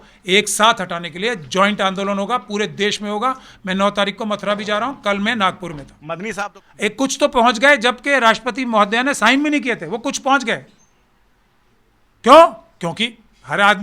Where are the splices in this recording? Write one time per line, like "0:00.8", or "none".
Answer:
0:06.3